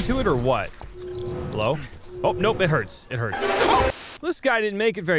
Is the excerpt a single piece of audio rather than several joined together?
no; 1 cut; at 3.8 s

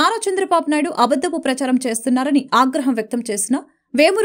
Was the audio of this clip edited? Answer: no; 0 cuts

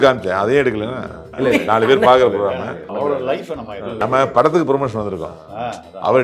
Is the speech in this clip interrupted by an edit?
yes; 3 cuts; at 1.3 s, 2.9 s, 4.0 s

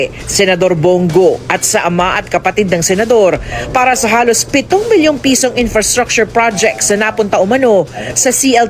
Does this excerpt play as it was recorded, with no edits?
yes; 0 cuts

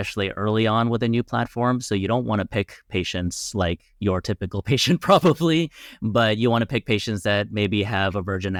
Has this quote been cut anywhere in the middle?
no; 0 cuts

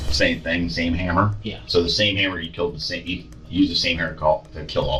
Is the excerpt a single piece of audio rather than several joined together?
yes; 0 cuts

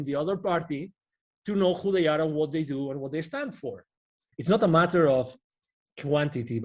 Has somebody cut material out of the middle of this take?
yes; 1 cut; at 4.2 s

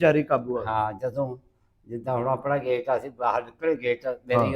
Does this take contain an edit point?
no; 0 cuts

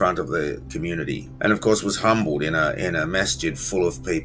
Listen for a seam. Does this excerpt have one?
yes; 1 cut; at 1.3 s

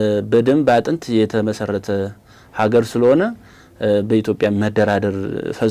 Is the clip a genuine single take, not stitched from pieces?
yes; 0 cuts

